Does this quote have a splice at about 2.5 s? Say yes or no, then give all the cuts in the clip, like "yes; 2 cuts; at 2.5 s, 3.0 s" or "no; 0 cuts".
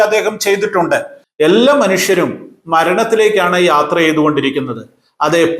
no; 1 cut; at 1.2 s